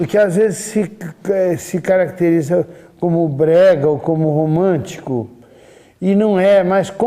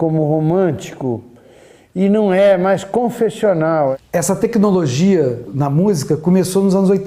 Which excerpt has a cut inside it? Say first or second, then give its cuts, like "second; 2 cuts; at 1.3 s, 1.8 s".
second; 1 cut; at 3.9 s